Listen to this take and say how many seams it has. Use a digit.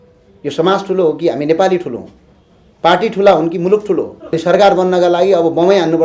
1